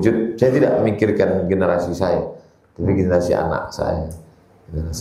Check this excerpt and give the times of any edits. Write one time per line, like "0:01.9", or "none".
none